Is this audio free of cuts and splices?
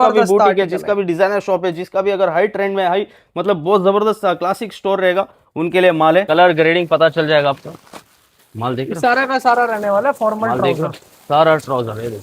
no; 1 cut; at 6.3 s

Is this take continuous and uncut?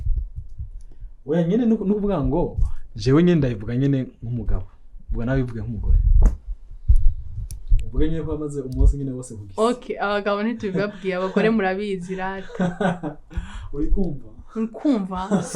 yes; 0 cuts

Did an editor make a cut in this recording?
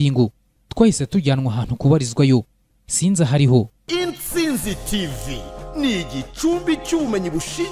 yes; 1 cut; at 3.8 s

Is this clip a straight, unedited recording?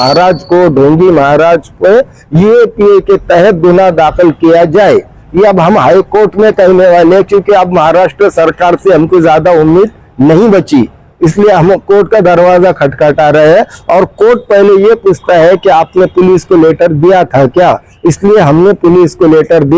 yes; 0 cuts

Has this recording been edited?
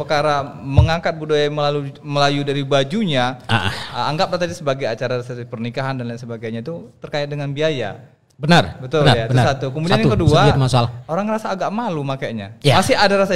no; 0 cuts

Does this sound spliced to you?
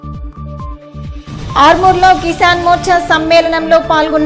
yes; 1 cut; at 1.0 s

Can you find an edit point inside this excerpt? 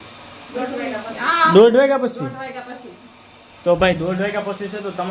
no; 0 cuts

